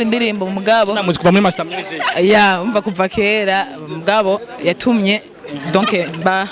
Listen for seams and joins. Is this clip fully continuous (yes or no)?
yes